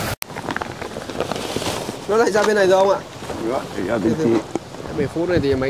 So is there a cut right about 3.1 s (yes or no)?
no